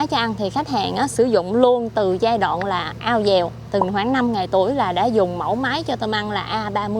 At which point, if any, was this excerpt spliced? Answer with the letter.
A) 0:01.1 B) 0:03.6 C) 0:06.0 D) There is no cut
B